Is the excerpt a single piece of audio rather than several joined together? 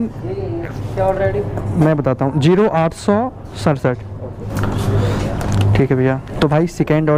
yes; 0 cuts

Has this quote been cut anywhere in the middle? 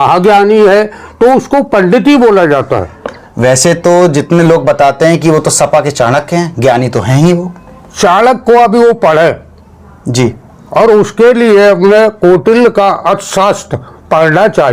no; 0 cuts

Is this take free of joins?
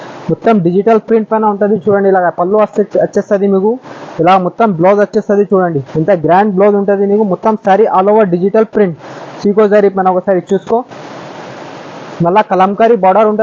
yes; 0 cuts

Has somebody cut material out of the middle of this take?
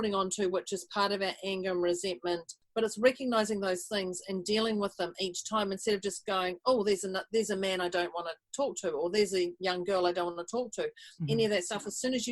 yes; 1 cut; at 2.6 s

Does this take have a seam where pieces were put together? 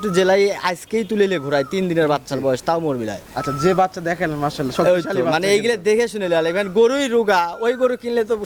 no; 0 cuts

